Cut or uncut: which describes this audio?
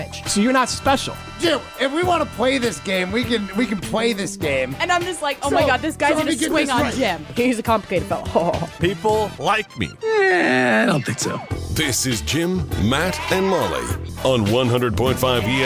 uncut